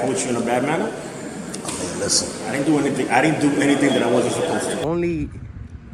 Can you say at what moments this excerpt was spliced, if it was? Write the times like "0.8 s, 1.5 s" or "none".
4.8 s